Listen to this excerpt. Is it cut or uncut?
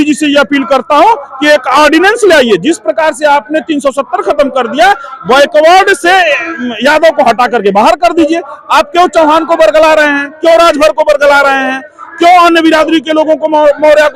uncut